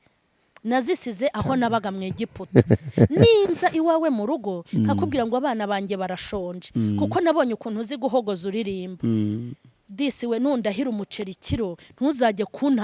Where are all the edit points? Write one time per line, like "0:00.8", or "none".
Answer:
none